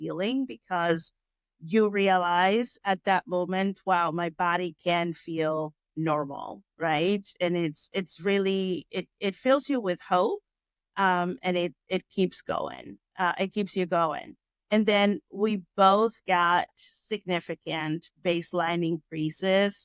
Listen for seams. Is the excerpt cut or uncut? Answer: uncut